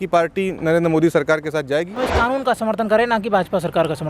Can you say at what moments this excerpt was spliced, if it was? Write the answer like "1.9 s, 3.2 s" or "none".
2.0 s